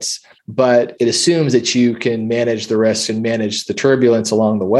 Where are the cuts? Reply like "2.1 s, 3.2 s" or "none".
none